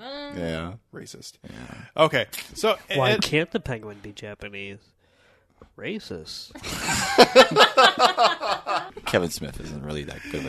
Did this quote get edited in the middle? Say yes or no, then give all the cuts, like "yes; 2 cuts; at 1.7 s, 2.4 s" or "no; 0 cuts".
yes; 1 cut; at 8.9 s